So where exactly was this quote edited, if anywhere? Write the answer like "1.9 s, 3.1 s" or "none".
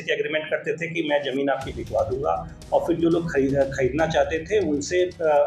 none